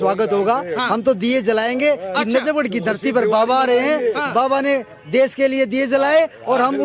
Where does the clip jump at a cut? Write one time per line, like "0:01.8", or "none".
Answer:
none